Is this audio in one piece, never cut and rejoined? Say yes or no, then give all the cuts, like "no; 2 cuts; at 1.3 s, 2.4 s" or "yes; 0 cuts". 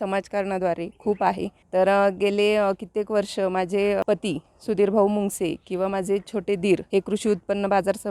no; 3 cuts; at 1.5 s, 4.0 s, 6.8 s